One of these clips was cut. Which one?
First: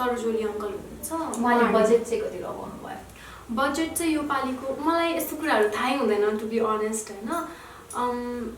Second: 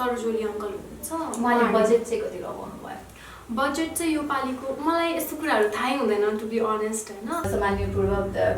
second; 1 cut; at 7.5 s

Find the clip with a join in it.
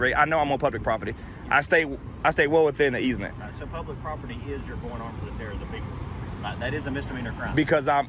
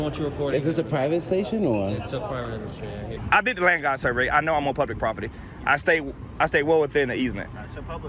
second; 1 cut; at 3.2 s

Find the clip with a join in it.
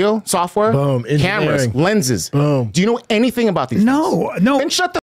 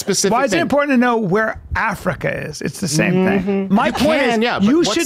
second; 1 cut; at 3.7 s

